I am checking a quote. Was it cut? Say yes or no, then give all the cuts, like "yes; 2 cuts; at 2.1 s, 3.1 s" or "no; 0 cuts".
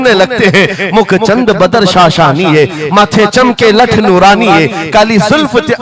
no; 0 cuts